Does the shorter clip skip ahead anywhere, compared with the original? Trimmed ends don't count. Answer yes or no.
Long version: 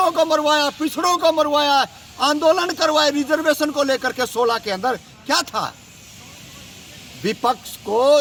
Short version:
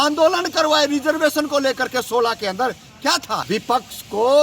yes